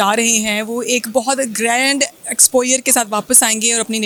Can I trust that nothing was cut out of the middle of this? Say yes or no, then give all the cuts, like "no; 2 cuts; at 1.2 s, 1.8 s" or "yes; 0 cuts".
yes; 0 cuts